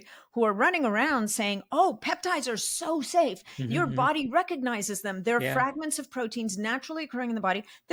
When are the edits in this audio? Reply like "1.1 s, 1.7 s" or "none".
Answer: none

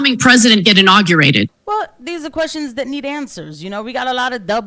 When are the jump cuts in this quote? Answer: 1.6 s

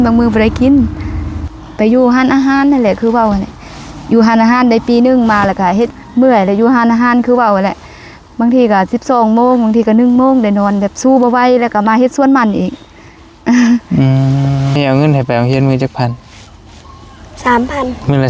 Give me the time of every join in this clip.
1.6 s, 5.9 s, 14.7 s

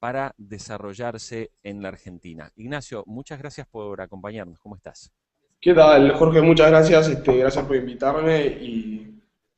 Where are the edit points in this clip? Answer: 5.5 s

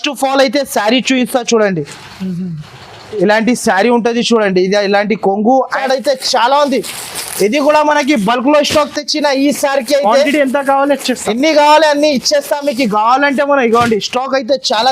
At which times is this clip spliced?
5.8 s

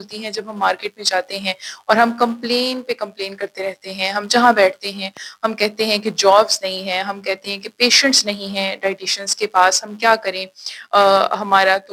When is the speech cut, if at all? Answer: none

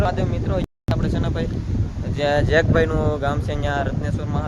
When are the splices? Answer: none

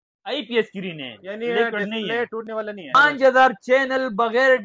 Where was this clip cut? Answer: 3.0 s

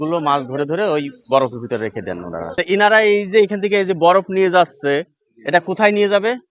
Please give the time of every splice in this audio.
2.4 s

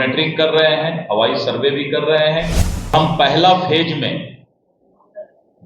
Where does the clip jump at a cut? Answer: 2.9 s

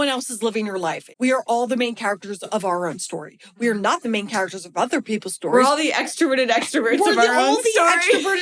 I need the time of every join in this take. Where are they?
1.0 s

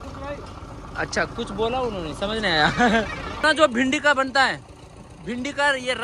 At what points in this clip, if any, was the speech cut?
3.4 s

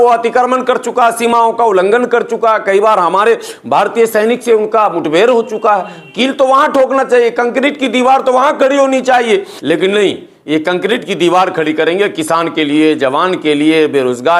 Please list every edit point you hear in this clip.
9.5 s

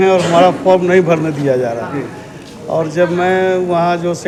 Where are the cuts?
none

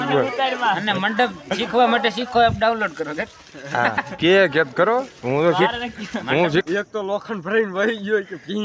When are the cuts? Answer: 6.7 s

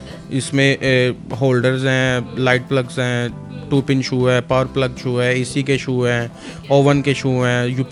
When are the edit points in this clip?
none

